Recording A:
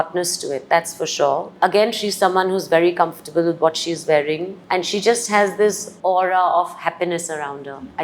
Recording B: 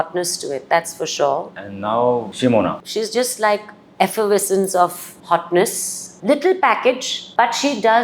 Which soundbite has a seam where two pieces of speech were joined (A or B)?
B